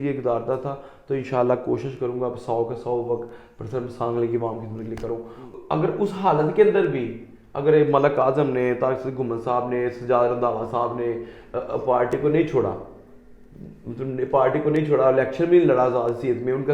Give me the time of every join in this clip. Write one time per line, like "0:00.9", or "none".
0:05.4